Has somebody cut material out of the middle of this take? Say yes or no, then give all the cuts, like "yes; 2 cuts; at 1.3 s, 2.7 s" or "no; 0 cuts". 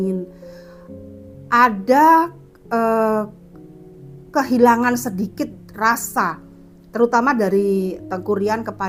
no; 0 cuts